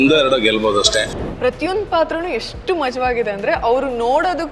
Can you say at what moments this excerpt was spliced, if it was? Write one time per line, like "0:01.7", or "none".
0:01.1